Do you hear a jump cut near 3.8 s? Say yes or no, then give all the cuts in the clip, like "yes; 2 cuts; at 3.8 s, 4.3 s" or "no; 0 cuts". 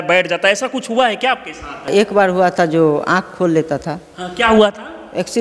no; 1 cut; at 1.9 s